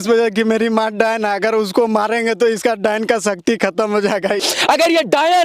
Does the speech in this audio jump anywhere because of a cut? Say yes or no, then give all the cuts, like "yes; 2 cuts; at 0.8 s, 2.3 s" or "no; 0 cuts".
yes; 1 cut; at 4.4 s